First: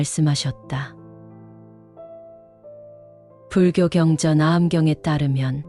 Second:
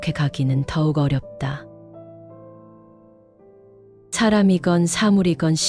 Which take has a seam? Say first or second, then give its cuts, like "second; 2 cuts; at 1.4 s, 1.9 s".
first; 2 cuts; at 0.9 s, 3.5 s